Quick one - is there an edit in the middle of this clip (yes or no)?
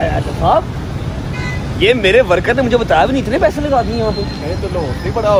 no